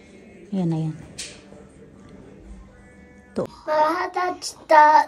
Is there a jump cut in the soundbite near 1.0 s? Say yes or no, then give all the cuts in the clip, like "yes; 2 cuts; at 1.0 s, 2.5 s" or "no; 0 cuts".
no; 1 cut; at 3.5 s